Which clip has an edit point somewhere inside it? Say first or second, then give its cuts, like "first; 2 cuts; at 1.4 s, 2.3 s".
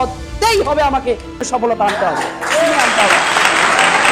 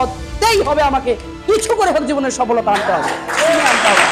first; 1 cut; at 1.4 s